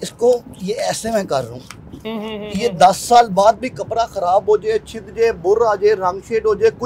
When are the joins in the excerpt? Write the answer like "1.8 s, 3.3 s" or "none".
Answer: none